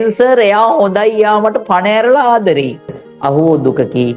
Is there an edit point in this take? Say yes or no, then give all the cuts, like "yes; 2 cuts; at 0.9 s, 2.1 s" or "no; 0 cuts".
yes; 1 cut; at 3.1 s